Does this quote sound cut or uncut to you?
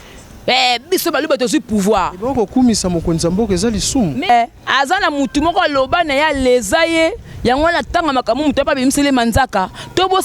cut